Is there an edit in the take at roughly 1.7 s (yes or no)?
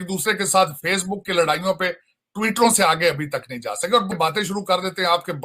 no